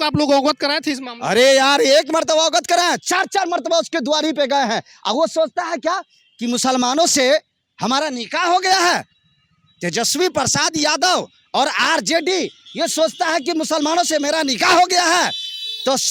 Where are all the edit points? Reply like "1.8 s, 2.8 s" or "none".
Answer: none